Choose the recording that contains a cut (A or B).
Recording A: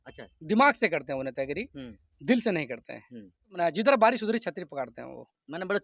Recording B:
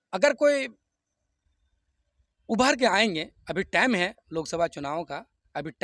A